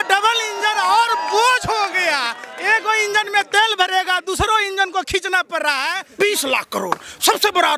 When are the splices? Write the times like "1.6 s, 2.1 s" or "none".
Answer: 6.0 s

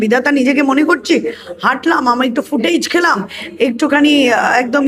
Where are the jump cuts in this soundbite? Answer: none

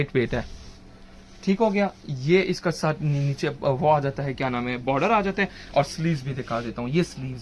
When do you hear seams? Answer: none

